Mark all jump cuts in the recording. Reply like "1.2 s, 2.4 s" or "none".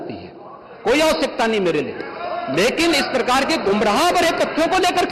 none